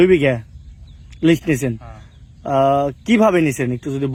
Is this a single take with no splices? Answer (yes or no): yes